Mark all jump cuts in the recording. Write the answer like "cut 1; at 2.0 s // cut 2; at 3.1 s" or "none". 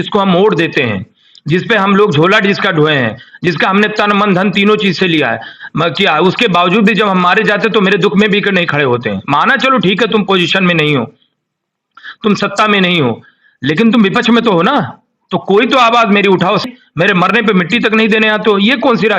cut 1; at 16.7 s